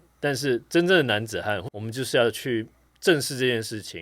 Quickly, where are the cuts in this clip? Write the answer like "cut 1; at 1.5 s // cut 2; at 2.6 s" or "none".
cut 1; at 1.6 s